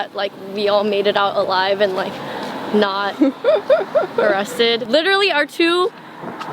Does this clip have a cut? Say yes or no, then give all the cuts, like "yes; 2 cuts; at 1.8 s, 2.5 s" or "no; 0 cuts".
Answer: yes; 1 cut; at 4.8 s